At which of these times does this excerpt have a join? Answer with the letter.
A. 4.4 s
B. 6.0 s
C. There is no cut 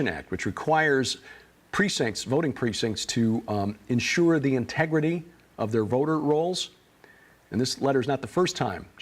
C